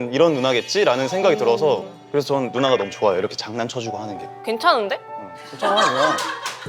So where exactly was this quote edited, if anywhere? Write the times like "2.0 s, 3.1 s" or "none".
4.2 s